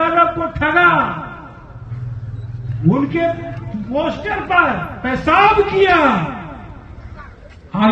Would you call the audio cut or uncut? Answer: uncut